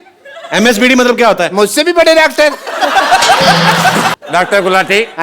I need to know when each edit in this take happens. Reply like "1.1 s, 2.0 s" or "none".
4.1 s